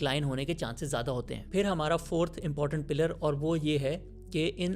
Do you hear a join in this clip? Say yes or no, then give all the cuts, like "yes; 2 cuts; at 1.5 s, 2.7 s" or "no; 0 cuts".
yes; 1 cut; at 1.4 s